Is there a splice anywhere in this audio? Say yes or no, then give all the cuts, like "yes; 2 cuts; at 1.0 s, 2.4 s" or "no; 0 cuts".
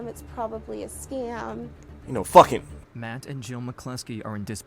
yes; 1 cut; at 2.8 s